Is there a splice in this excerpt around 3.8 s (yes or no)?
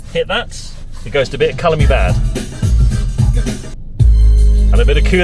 no